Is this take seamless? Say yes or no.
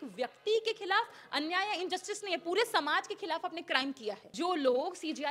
no